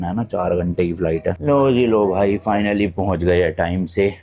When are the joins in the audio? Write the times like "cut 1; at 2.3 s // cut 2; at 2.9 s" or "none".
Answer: cut 1; at 1.4 s